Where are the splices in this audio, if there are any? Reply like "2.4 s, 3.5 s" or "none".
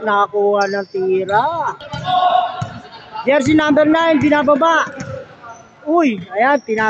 1.9 s